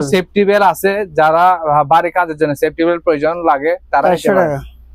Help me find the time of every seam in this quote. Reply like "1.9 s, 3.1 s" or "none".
none